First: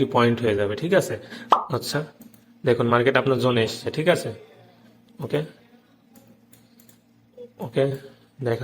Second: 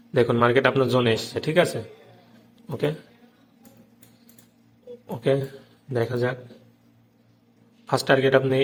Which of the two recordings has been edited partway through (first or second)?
first